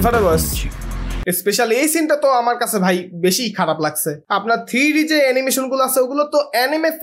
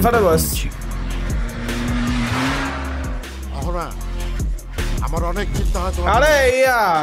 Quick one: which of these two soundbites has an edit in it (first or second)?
first